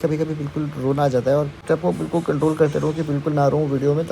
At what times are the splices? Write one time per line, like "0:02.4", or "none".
0:01.6